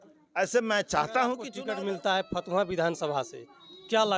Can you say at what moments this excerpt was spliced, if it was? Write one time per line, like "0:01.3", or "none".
0:01.5